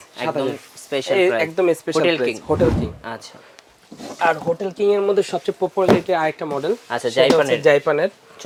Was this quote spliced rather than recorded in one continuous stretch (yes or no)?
no